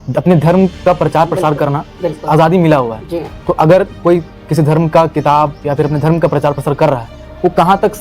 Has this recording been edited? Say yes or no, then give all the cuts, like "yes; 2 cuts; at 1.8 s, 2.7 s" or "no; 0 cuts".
no; 0 cuts